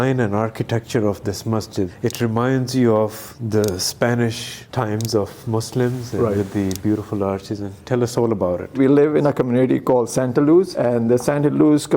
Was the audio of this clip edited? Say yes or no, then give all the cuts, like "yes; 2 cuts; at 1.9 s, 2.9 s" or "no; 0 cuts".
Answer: no; 0 cuts